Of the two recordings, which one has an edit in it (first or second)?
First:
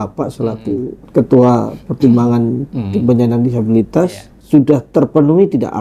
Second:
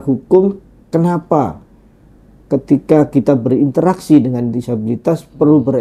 first